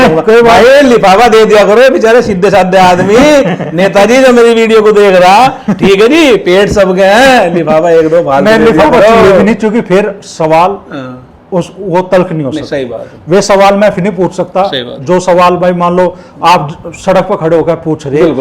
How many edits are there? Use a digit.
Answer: 0